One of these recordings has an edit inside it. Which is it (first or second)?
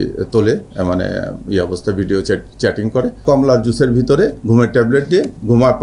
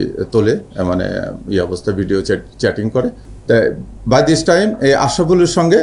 first